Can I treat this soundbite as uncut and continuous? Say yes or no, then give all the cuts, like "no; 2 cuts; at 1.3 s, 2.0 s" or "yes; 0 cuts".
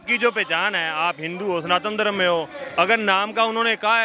yes; 0 cuts